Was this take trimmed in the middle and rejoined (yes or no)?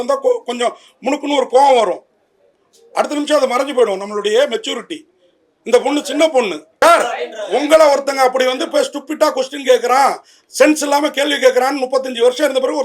yes